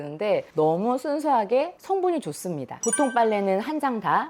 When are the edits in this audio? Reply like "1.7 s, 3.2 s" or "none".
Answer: 2.8 s